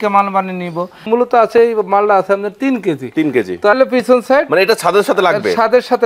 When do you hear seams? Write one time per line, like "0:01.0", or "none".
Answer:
0:01.0
0:03.7